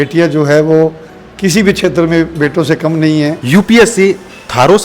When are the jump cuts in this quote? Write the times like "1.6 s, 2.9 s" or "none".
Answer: 3.4 s